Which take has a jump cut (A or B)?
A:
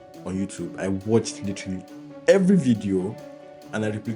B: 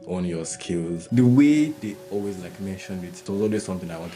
B